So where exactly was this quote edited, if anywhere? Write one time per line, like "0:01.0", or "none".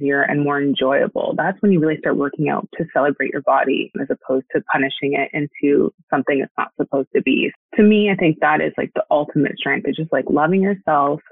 0:04.0
0:07.5